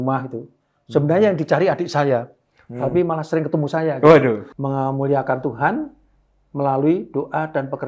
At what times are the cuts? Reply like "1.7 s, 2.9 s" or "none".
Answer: 4.4 s